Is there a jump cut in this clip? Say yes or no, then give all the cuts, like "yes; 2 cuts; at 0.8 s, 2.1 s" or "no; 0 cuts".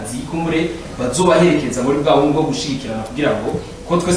no; 0 cuts